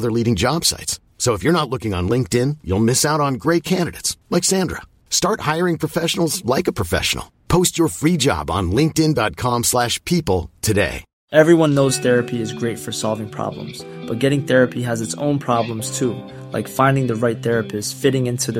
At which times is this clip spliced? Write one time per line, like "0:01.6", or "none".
none